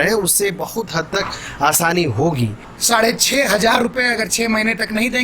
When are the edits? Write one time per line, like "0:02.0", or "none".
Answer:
0:02.7